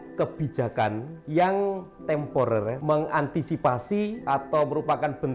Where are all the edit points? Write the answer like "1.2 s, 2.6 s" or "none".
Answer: 1.1 s, 2.8 s, 4.2 s

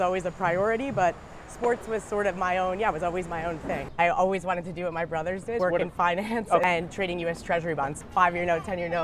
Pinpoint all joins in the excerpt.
3.9 s, 5.6 s, 6.6 s, 8.0 s

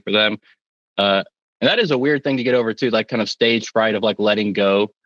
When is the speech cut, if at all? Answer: none

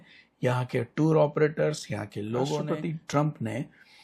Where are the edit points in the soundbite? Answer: 2.7 s

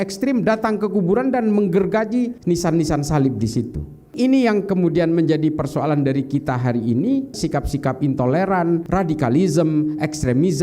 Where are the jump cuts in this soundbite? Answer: 2.4 s, 4.1 s, 7.3 s, 8.9 s

